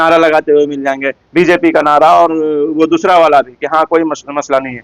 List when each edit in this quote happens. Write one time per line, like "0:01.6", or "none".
none